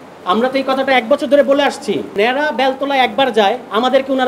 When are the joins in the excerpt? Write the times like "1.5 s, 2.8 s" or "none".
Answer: 2.2 s

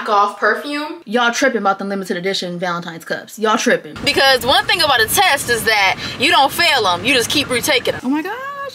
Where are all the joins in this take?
0.9 s, 4.0 s, 8.0 s

